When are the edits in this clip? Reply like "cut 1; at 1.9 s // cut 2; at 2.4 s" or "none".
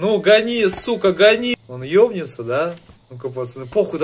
cut 1; at 1.5 s